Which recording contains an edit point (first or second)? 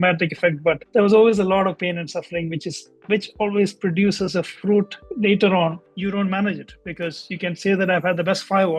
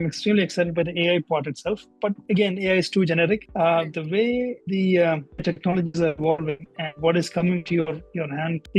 first